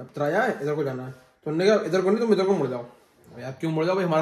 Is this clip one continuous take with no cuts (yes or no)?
yes